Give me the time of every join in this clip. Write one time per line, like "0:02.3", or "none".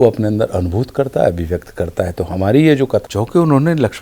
0:03.0